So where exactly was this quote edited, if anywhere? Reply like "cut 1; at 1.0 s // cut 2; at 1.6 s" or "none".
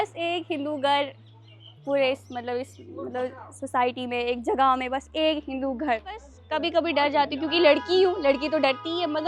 cut 1; at 6.3 s